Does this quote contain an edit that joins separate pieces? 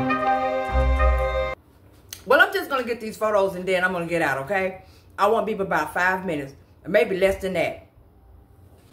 no; 0 cuts

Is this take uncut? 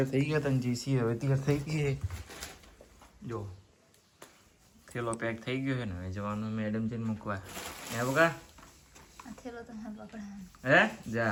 yes; 0 cuts

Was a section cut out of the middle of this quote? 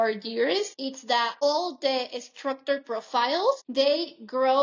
yes; 2 cuts; at 1.0 s, 3.6 s

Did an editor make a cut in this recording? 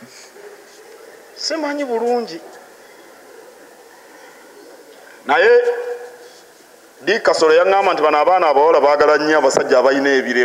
no; 0 cuts

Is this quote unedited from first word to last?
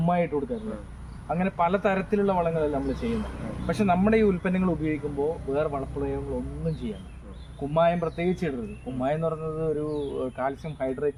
yes; 0 cuts

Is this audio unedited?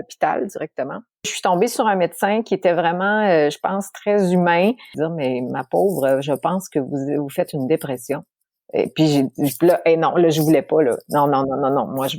no; 2 cuts; at 1.3 s, 4.9 s

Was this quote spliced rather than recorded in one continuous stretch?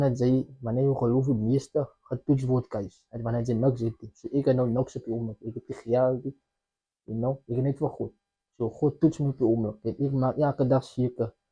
no; 0 cuts

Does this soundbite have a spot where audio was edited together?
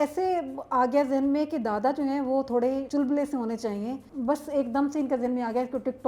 yes; 2 cuts; at 2.8 s, 4.1 s

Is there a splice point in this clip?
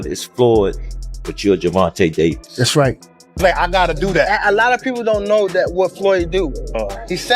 yes; 1 cut; at 3.2 s

